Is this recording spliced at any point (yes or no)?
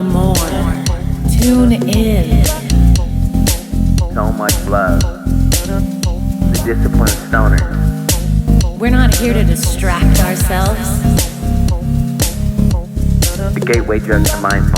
yes